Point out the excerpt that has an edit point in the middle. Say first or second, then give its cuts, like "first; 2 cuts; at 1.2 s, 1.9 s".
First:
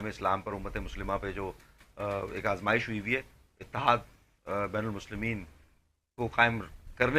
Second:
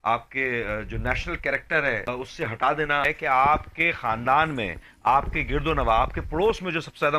second; 2 cuts; at 2.1 s, 3.0 s